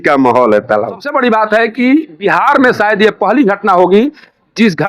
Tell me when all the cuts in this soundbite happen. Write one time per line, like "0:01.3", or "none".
0:01.1